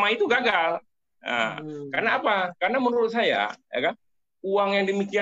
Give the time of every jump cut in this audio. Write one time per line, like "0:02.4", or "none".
none

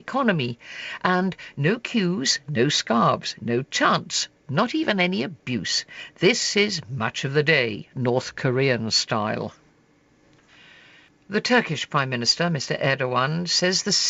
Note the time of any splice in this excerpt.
0:08.5

